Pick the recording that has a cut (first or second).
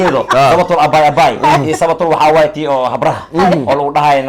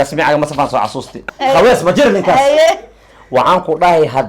second